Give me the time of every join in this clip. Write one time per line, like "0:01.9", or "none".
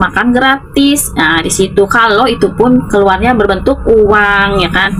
none